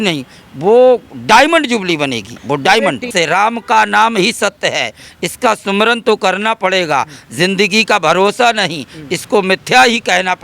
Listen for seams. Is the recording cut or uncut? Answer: cut